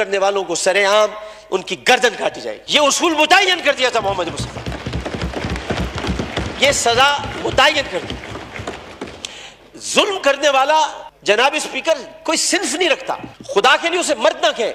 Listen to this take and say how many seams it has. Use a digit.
0